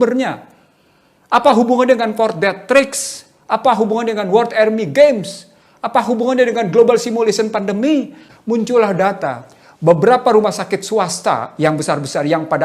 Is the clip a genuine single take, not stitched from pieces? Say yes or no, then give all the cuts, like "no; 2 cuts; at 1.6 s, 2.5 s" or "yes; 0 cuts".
no; 1 cut; at 8.2 s